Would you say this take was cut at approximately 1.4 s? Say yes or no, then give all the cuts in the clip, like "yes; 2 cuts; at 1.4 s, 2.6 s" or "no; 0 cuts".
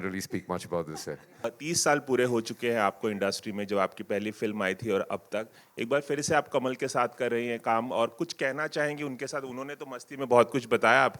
yes; 1 cut; at 1.4 s